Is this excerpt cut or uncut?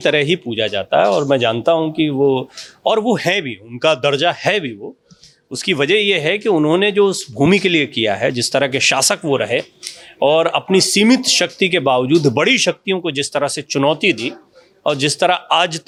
uncut